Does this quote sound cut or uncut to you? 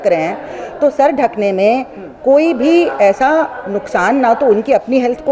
uncut